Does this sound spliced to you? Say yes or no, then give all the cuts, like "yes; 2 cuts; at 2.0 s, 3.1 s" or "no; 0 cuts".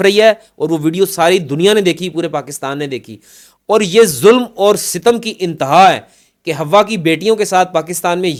no; 0 cuts